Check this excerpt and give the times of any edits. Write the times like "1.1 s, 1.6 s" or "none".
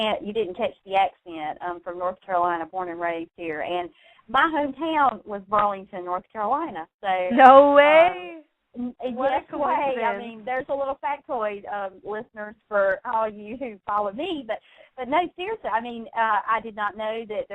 2.9 s